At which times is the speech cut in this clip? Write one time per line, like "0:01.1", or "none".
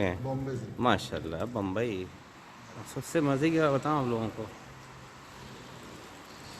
0:01.9